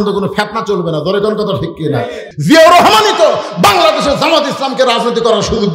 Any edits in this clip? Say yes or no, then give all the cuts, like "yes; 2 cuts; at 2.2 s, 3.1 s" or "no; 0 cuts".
yes; 1 cut; at 2.3 s